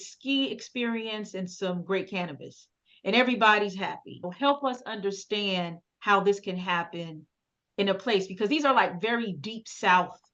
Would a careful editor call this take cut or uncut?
cut